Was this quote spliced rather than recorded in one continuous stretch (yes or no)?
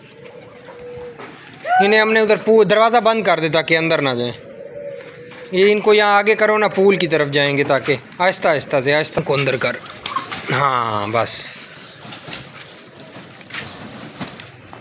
yes